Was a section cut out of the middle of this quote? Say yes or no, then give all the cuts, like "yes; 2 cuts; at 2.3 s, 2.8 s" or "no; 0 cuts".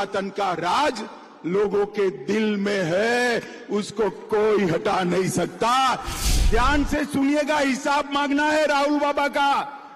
yes; 1 cut; at 6.1 s